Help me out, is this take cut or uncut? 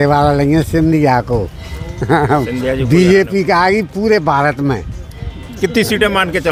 uncut